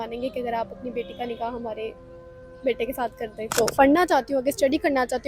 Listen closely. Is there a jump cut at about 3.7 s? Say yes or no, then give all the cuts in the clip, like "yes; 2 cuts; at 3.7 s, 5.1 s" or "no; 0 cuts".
yes; 1 cut; at 3.7 s